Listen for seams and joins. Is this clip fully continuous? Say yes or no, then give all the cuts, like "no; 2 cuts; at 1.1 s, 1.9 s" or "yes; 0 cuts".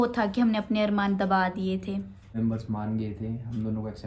no; 1 cut; at 2.4 s